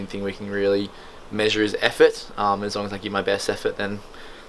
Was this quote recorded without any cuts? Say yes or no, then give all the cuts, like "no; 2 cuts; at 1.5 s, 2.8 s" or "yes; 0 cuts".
yes; 0 cuts